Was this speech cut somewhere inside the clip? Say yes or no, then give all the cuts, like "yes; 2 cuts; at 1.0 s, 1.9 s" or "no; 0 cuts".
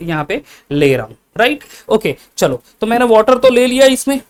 no; 0 cuts